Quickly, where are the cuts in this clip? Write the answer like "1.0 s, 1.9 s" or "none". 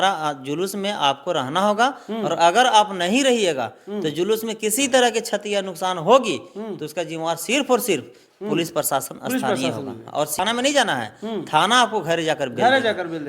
10.4 s

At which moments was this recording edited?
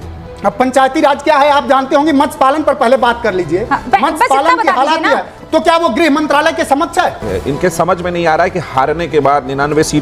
7.3 s

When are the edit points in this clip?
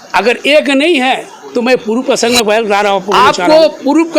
3.1 s

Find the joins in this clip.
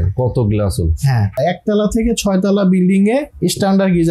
1.4 s

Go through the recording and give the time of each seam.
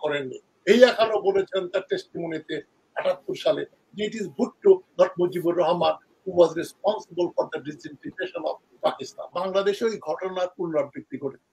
9.3 s

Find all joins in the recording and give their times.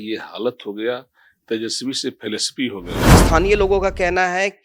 3.2 s

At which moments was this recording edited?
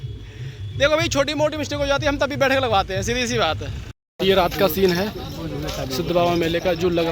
4.0 s

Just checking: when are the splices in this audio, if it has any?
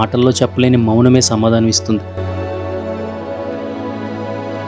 none

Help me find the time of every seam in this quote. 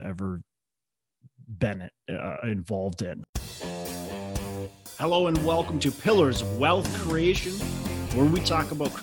3.2 s

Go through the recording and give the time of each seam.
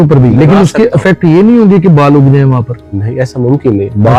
none

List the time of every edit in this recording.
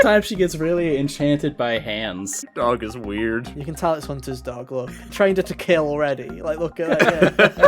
2.5 s, 5.0 s

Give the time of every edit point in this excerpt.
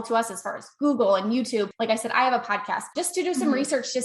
1.7 s, 2.9 s

